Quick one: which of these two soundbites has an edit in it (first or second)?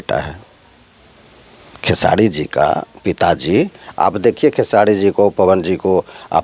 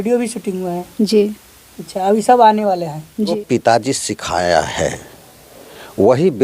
second